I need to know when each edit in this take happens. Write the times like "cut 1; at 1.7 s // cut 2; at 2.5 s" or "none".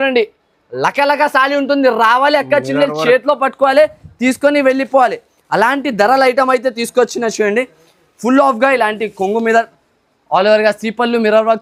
none